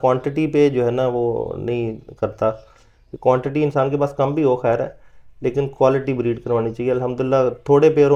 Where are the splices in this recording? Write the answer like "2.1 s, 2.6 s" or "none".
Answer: none